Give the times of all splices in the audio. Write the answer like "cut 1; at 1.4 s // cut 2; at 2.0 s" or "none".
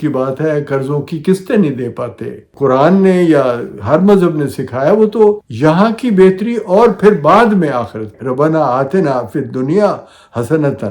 cut 1; at 2.5 s // cut 2; at 5.5 s // cut 3; at 8.1 s